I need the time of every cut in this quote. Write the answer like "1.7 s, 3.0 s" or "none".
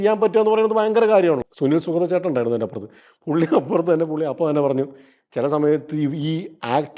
1.4 s